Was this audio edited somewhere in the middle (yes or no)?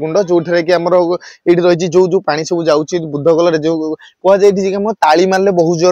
no